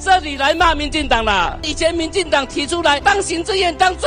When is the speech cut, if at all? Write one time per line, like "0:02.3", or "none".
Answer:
0:01.6
0:03.0

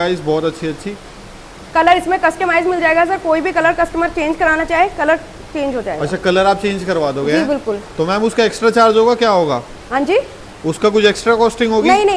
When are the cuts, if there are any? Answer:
none

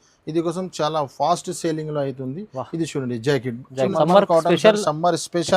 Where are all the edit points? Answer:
0:03.9

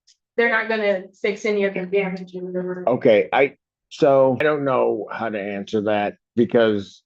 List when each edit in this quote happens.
0:04.4

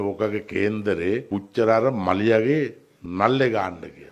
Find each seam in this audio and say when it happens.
0:01.2

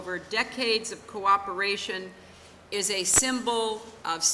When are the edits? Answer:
0:02.7

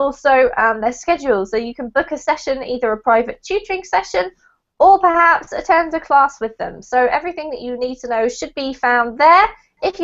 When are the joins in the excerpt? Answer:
0:03.8

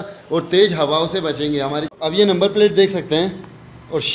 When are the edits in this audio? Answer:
0:01.9

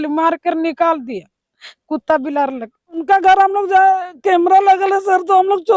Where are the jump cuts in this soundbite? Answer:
0:03.1

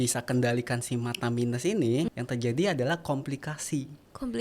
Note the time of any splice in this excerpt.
0:02.1

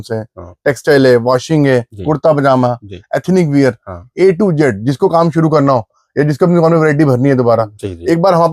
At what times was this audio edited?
none

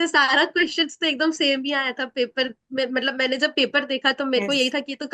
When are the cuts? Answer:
none

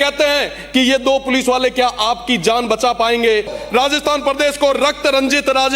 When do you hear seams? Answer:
0:03.6

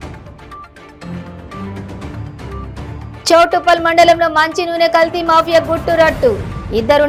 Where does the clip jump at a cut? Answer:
none

